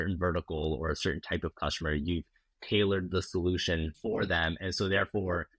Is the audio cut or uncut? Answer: cut